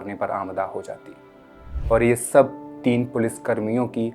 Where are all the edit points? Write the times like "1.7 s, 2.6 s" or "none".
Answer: 1.7 s